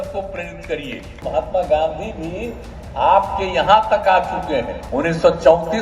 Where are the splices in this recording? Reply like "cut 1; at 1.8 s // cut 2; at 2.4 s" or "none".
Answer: cut 1; at 1.2 s // cut 2; at 4.8 s